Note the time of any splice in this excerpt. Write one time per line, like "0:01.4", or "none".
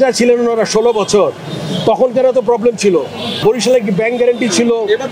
0:03.2